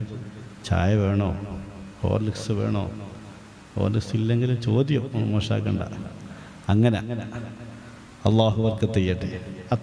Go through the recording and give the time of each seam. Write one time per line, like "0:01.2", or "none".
none